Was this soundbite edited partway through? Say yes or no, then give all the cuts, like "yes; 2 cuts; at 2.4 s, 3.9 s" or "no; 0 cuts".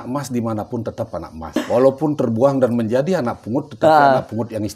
yes; 1 cut; at 1.6 s